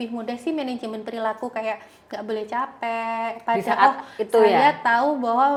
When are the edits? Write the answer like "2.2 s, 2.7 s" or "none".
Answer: none